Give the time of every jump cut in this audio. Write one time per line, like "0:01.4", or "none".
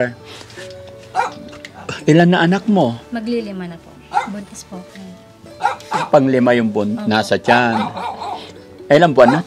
none